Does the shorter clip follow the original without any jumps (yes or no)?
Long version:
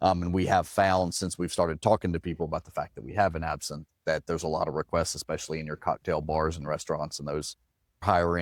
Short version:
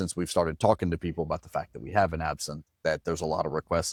yes